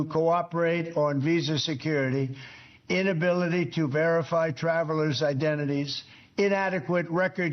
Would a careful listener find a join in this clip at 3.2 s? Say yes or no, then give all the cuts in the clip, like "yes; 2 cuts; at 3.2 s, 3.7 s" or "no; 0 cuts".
yes; 1 cut; at 3.2 s